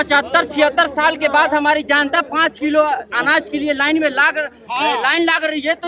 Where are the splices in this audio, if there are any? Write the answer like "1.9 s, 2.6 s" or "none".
none